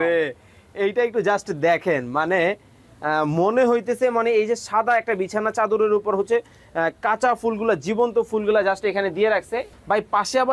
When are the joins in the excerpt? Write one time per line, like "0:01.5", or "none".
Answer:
0:09.3